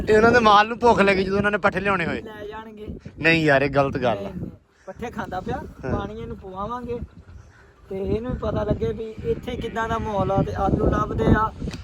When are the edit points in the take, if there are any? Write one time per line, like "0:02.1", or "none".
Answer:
none